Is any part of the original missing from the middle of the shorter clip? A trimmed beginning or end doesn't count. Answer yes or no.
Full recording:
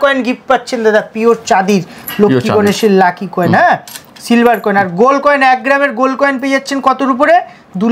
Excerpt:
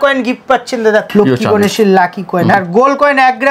yes